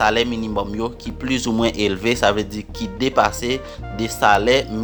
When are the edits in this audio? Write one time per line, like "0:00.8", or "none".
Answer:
none

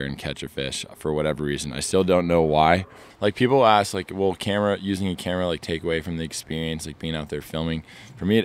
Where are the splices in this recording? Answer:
0:03.0

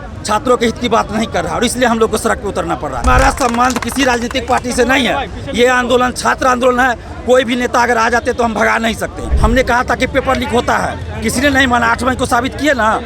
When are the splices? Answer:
0:03.0
0:09.3

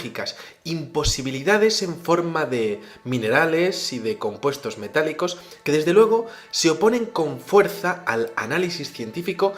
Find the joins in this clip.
0:04.2

